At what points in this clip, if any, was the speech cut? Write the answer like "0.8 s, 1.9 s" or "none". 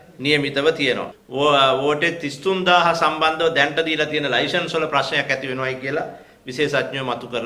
1.1 s